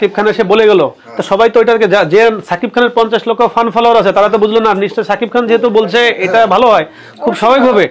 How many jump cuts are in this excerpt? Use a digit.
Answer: 0